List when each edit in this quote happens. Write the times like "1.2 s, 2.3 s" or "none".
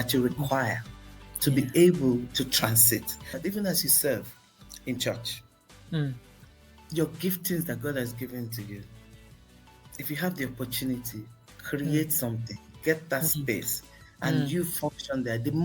3.4 s